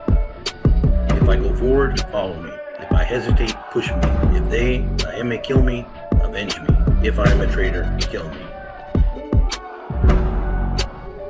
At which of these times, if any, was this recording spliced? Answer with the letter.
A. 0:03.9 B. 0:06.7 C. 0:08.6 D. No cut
C